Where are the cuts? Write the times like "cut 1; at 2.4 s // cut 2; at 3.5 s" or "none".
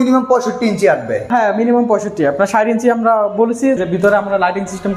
cut 1; at 1.3 s // cut 2; at 3.8 s

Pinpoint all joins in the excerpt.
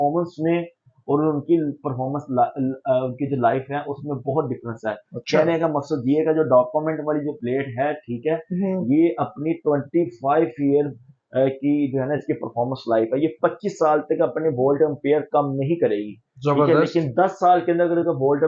none

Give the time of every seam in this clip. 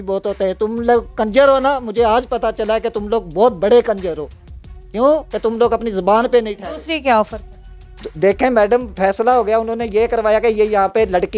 none

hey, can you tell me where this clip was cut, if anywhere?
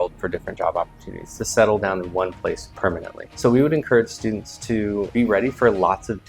cut 1; at 5.1 s

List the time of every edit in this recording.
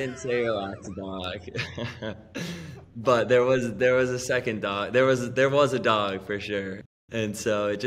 cut 1; at 6.9 s

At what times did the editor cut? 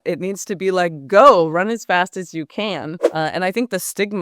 cut 1; at 3.0 s

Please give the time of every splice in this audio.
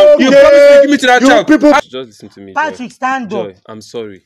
cut 1; at 1.8 s

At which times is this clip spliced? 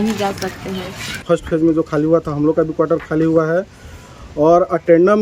none

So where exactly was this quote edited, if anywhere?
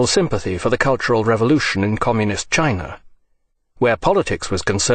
cut 1; at 1.4 s

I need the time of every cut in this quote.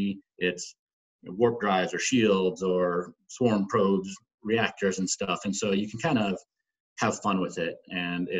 none

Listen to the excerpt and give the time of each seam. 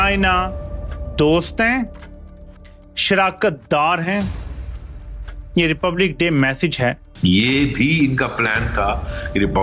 cut 1; at 7.1 s

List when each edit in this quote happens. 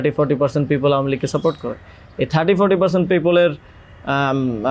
none

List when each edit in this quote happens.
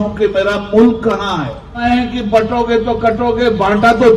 cut 1; at 1.8 s

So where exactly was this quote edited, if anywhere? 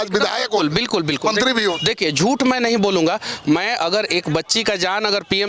none

